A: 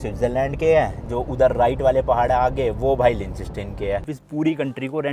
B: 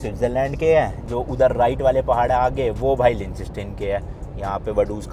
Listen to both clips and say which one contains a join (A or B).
A